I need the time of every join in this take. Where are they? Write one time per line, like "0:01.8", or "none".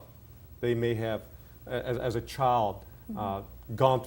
none

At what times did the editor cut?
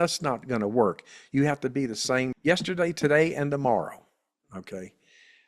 0:02.3

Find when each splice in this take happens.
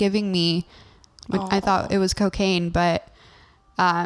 0:01.2

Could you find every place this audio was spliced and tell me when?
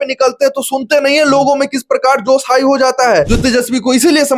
0:03.3

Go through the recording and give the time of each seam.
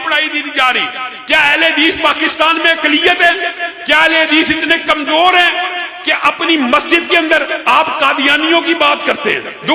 none

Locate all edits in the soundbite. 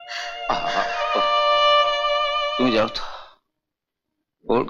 0:02.5

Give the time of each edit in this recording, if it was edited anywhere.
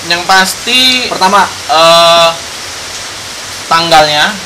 none

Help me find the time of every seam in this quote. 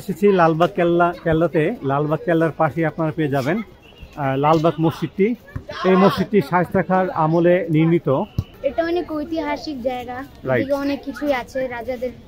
0:08.6

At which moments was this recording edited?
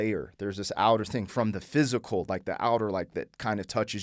none

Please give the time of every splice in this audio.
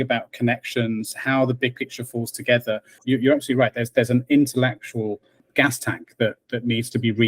0:03.0
0:05.4

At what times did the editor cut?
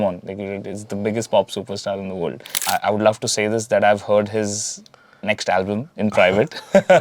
0:02.5

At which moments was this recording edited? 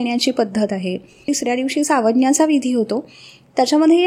0:01.3

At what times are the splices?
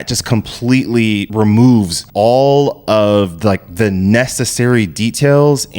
0:01.3
0:02.0

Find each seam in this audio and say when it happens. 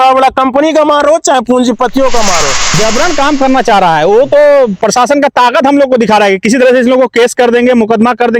0:02.8

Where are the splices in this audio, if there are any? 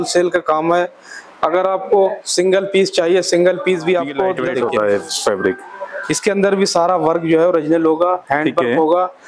0:04.4

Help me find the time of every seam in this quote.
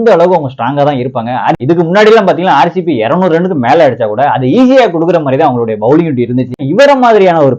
0:01.6
0:06.6

